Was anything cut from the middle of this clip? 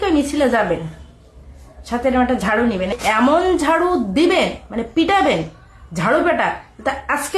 yes; 1 cut; at 3.0 s

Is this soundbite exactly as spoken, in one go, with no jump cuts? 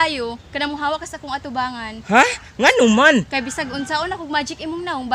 yes; 0 cuts

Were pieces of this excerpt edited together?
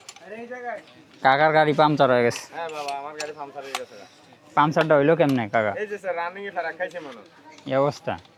no; 0 cuts

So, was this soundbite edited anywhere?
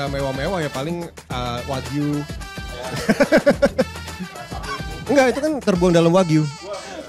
no; 0 cuts

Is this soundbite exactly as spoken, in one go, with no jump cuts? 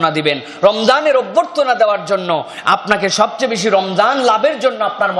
yes; 0 cuts

